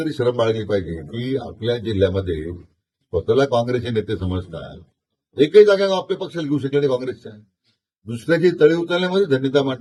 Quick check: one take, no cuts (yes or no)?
yes